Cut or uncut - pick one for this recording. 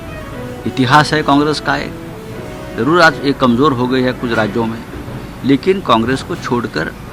uncut